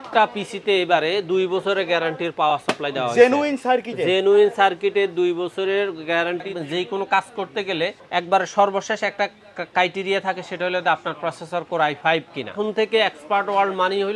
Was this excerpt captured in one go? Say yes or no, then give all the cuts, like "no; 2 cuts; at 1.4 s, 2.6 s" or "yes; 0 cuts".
no; 3 cuts; at 6.5 s, 8.0 s, 12.6 s